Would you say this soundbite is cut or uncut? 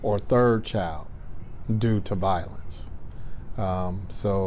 uncut